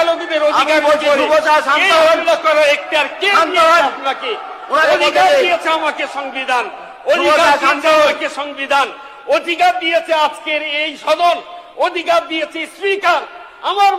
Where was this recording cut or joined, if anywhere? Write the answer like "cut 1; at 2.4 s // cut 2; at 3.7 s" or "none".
none